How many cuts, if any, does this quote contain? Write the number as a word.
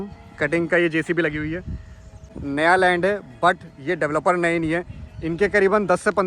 one